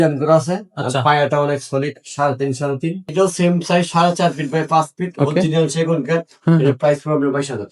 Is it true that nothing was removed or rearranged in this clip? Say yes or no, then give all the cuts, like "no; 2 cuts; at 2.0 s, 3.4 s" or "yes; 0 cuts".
no; 1 cut; at 3.0 s